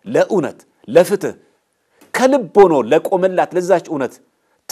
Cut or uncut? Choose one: uncut